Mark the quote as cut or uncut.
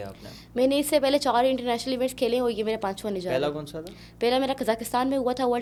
uncut